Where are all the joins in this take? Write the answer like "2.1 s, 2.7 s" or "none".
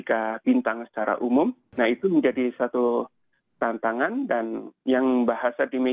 1.7 s